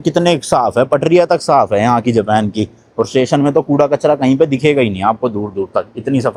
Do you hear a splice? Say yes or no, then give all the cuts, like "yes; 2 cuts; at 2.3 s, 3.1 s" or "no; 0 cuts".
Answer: no; 0 cuts